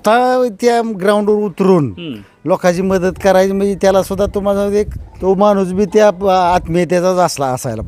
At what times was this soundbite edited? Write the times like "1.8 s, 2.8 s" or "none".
5.1 s